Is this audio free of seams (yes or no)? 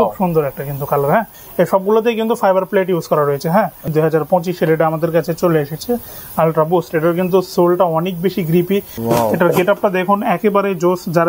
no